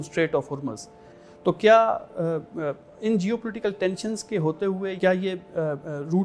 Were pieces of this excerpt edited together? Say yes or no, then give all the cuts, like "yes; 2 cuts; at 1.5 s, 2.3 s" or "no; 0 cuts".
yes; 2 cuts; at 1.1 s, 4.9 s